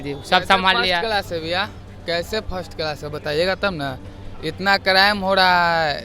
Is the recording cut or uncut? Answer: uncut